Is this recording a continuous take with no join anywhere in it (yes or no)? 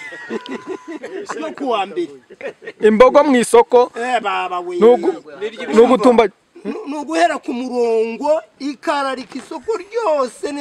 yes